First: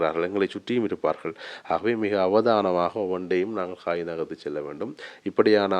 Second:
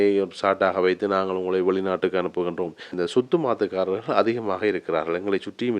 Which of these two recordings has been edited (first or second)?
second